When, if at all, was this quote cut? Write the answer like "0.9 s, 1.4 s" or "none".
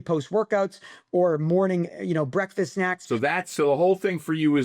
3.0 s